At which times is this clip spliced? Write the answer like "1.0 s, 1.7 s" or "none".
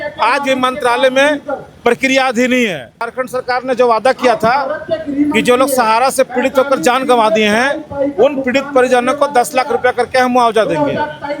3.0 s